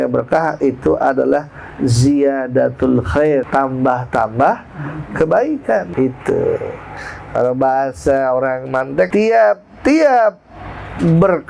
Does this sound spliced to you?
yes; 3 cuts; at 3.5 s, 5.9 s, 9.1 s

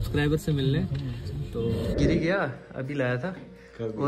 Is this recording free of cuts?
no; 1 cut; at 2.0 s

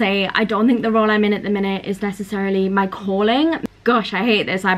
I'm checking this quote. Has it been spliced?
yes; 1 cut; at 3.6 s

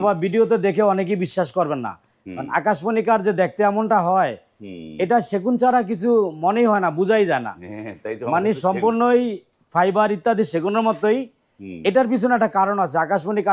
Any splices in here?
no; 0 cuts

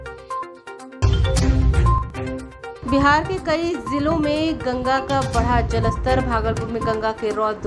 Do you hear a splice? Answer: no; 0 cuts

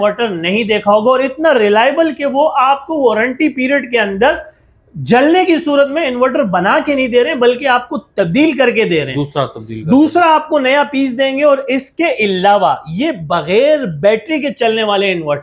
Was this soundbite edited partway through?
no; 0 cuts

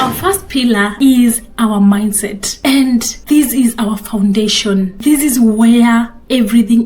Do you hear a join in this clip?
yes; 4 cuts; at 0.9 s, 2.5 s, 3.1 s, 4.9 s

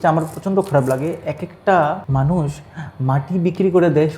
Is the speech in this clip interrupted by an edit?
yes; 1 cut; at 2.0 s

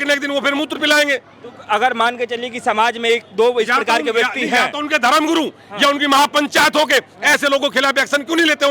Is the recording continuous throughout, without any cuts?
yes; 0 cuts

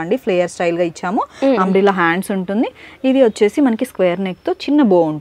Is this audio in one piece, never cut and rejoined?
yes; 0 cuts

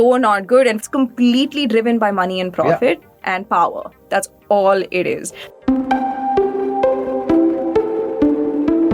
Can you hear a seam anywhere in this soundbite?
no; 0 cuts

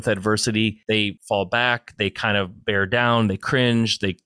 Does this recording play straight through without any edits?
no; 1 cut; at 1.0 s

